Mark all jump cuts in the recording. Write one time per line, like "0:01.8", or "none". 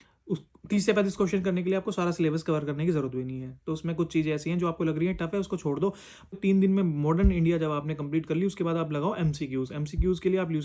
0:06.3